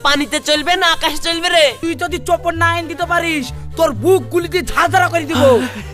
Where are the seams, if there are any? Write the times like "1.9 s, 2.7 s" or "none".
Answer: 1.8 s